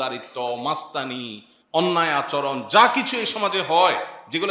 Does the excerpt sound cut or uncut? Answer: uncut